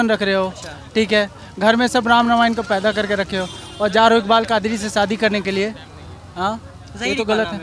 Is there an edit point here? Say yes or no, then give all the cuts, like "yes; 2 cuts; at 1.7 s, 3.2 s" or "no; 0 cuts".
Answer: no; 0 cuts